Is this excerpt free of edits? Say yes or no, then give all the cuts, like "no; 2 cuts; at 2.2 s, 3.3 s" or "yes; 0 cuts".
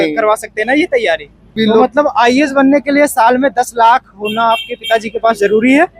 no; 1 cut; at 1.6 s